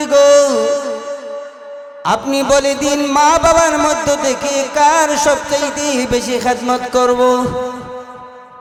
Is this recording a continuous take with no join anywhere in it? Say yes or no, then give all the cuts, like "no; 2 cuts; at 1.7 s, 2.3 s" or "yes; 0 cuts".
yes; 0 cuts